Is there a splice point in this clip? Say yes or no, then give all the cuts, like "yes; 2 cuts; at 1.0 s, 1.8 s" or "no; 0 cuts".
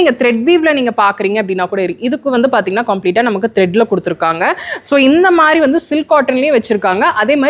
no; 0 cuts